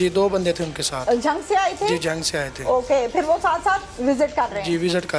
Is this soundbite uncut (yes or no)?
yes